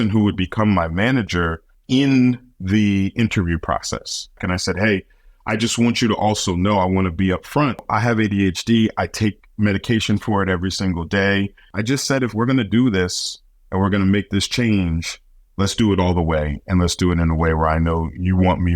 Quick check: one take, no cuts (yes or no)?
no